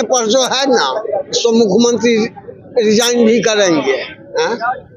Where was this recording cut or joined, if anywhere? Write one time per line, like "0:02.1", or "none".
none